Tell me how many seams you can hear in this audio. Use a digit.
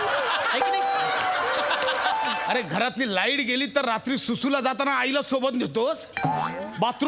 1